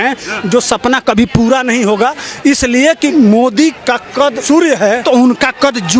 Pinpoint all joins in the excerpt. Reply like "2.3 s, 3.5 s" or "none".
3.1 s, 4.4 s, 5.0 s